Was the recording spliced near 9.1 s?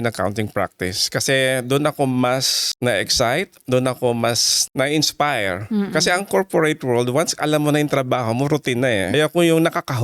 yes; 1 cut; at 9.1 s

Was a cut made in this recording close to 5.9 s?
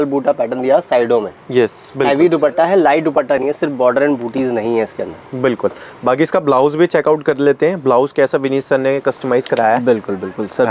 no; 0 cuts

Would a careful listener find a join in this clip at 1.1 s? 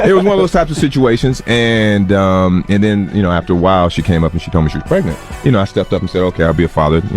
no; 1 cut; at 5.2 s

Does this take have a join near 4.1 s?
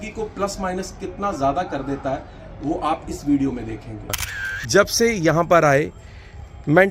yes; 1 cut; at 4.1 s

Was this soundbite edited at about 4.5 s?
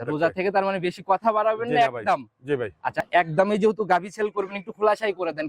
no; 1 cut; at 3.0 s

